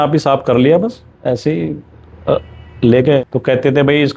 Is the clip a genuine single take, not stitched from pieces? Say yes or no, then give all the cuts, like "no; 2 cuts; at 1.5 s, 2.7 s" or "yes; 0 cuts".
no; 1 cut; at 3.2 s